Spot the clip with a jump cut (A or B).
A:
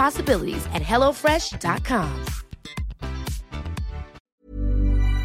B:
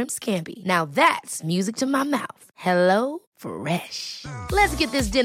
A